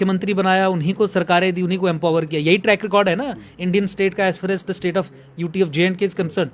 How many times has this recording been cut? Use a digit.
0